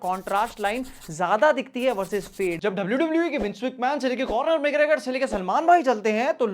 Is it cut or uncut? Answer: cut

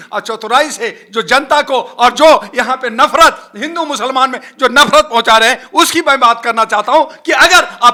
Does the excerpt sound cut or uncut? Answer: uncut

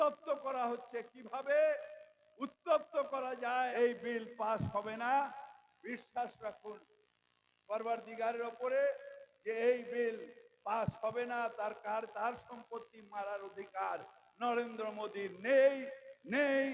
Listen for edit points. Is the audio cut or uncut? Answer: cut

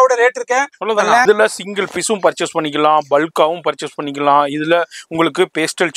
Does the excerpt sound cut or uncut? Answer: cut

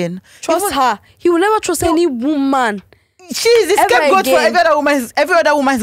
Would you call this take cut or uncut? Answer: uncut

